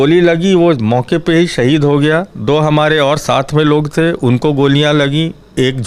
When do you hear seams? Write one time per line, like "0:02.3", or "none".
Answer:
none